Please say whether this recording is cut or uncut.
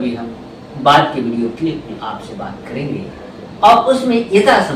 uncut